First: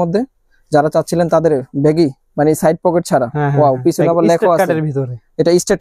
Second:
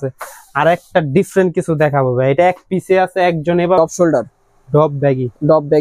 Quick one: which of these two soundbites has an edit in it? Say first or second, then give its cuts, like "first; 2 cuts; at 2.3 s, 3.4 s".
second; 1 cut; at 3.8 s